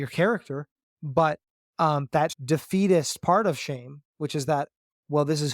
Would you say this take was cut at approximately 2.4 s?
yes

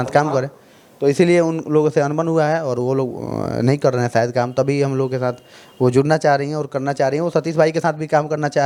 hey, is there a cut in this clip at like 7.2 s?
no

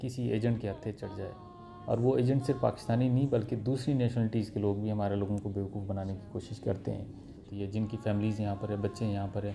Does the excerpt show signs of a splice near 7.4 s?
yes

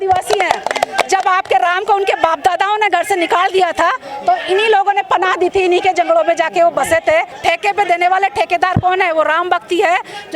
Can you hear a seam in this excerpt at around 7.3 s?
yes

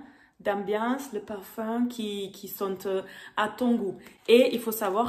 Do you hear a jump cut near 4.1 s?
yes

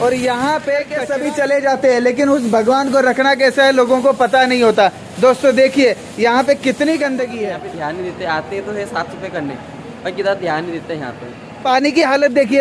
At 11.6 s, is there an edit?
yes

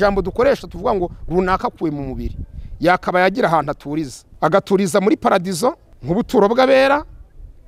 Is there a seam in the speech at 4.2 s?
yes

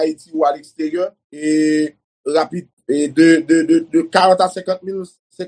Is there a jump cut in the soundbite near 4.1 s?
no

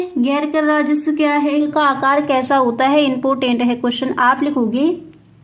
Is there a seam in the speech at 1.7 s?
yes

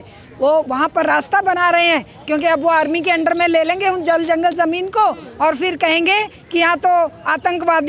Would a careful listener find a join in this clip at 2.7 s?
no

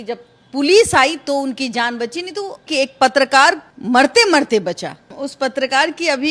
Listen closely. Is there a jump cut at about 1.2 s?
no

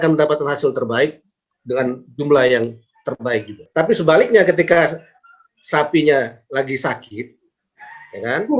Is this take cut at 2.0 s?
no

